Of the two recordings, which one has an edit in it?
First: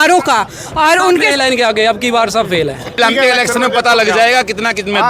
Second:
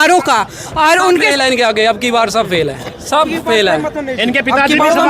first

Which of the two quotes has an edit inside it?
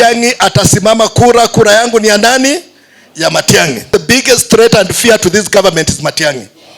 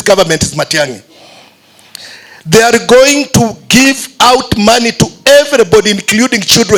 first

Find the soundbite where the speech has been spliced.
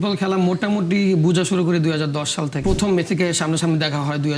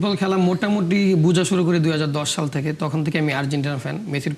first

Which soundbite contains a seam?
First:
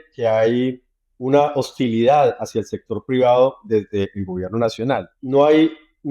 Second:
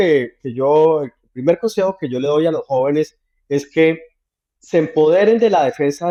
first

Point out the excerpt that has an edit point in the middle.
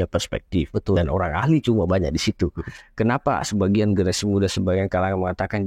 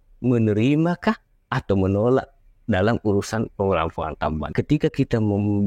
second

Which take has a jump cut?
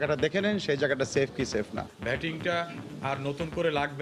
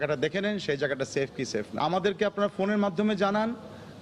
first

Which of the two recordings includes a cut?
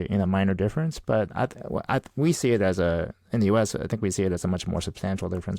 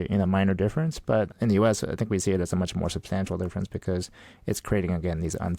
second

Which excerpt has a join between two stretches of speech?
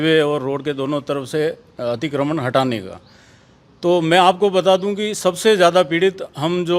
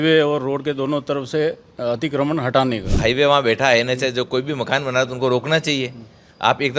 second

